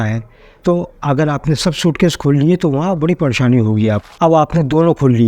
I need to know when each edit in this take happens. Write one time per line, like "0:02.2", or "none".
0:04.1

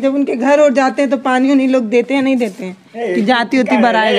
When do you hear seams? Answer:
none

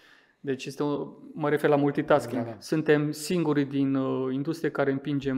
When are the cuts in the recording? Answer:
0:02.6

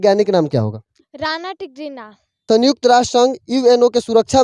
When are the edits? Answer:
0:02.4

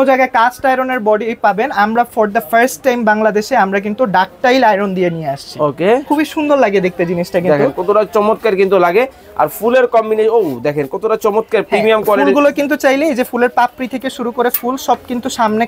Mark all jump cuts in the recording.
0:06.0

